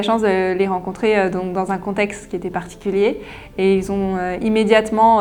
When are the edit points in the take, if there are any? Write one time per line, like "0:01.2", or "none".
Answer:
none